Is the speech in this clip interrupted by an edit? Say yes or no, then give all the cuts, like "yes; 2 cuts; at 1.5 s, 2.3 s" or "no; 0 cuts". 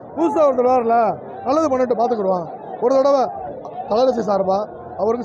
no; 0 cuts